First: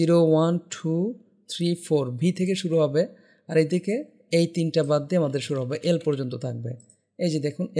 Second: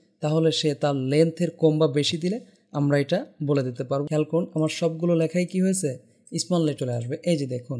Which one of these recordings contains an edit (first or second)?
second